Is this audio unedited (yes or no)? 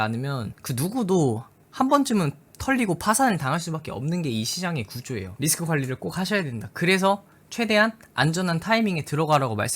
no